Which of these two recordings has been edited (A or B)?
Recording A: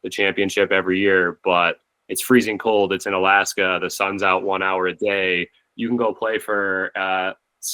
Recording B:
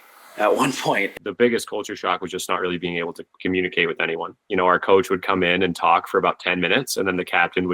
B